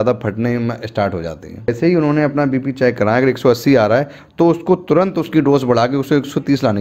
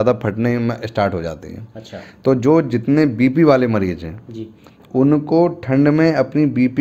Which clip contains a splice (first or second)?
first